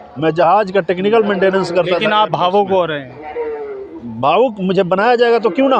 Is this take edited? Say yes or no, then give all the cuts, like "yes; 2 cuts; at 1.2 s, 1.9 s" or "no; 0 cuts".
no; 0 cuts